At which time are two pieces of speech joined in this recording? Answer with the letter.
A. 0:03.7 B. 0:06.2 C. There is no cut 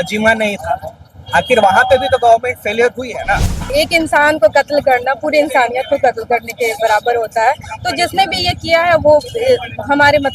A